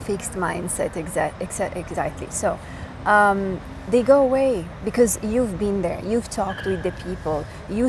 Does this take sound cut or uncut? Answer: uncut